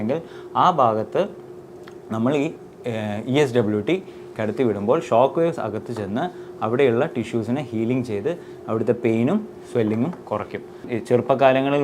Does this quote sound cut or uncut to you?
cut